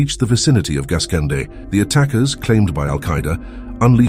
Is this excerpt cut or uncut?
cut